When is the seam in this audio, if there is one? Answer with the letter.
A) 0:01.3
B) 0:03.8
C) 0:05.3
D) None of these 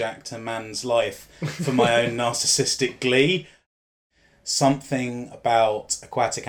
B